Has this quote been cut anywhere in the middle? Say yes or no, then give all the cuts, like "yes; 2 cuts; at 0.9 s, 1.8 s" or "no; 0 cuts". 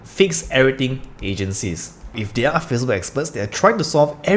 yes; 1 cut; at 2.2 s